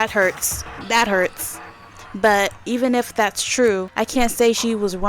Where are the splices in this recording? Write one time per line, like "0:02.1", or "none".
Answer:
0:02.6
0:03.9